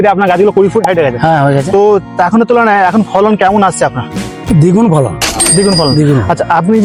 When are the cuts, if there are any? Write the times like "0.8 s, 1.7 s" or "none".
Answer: none